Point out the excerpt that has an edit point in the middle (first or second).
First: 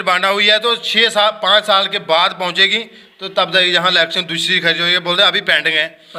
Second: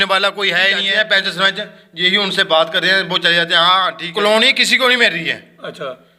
second